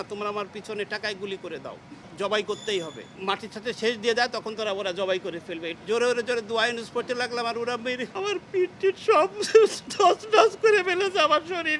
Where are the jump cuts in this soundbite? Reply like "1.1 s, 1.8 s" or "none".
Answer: 2.0 s, 3.1 s, 5.7 s, 8.1 s